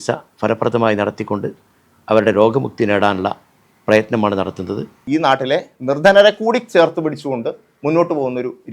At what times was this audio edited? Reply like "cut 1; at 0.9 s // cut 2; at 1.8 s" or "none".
cut 1; at 5.0 s

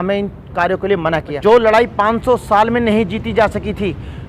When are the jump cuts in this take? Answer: cut 1; at 1.4 s

